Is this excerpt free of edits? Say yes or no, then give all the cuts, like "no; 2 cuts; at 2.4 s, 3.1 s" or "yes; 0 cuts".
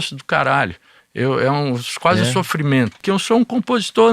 no; 1 cut; at 3.0 s